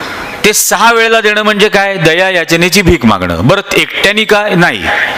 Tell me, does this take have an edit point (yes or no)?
no